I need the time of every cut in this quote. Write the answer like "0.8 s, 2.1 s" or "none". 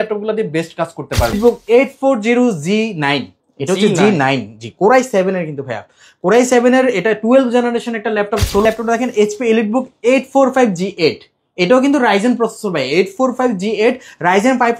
1.3 s, 8.6 s

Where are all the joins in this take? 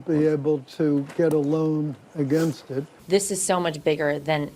2.9 s

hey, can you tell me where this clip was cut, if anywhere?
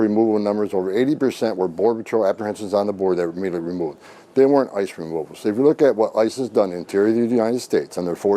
none

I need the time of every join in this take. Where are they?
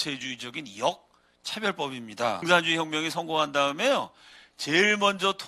2.4 s

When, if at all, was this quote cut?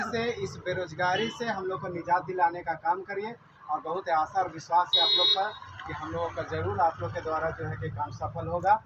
none

